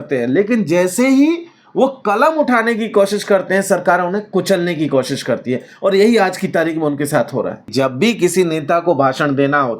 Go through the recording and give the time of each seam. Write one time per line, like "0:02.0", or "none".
0:07.7